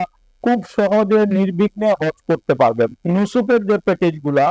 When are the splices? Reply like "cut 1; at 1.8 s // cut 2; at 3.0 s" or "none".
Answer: cut 1; at 3.0 s